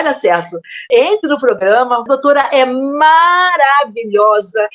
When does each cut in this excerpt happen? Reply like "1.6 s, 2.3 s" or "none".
0.9 s, 2.0 s